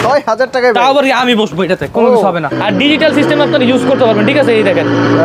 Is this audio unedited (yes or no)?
no